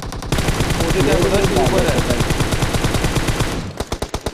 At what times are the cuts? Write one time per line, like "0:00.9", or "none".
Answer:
none